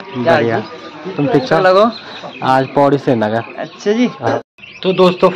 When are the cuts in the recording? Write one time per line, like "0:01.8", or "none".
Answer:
0:04.4